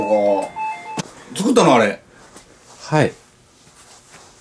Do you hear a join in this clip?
yes; 1 cut; at 1.1 s

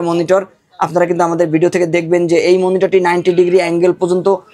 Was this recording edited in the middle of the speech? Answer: no; 0 cuts

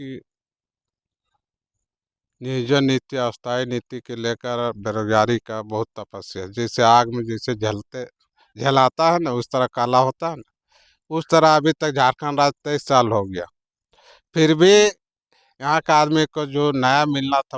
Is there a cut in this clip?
no; 0 cuts

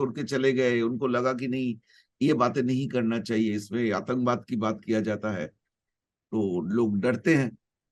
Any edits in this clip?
no; 0 cuts

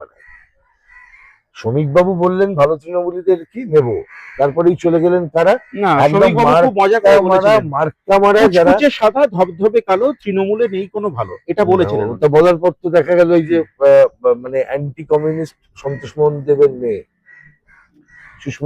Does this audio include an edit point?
no; 0 cuts

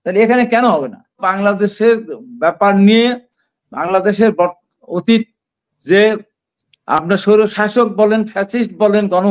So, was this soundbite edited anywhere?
yes; 1 cut; at 1.3 s

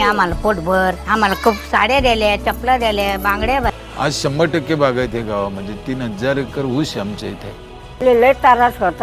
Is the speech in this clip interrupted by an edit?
yes; 2 cuts; at 3.8 s, 8.0 s

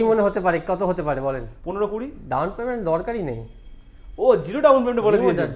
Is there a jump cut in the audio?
yes; 1 cut; at 1.5 s

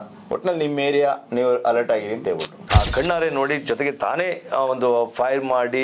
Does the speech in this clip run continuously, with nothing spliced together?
no; 1 cut; at 2.5 s

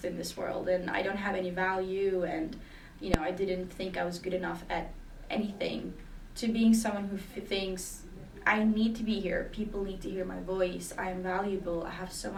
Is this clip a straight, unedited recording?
yes; 0 cuts

